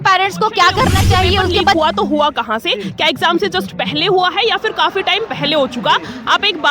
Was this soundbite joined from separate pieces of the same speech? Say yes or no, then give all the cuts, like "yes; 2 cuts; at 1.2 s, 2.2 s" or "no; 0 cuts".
yes; 1 cut; at 1.7 s